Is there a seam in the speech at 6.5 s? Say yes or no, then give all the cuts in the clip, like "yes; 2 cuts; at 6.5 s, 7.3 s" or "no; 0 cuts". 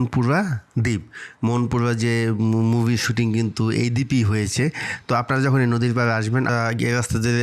yes; 1 cut; at 6.5 s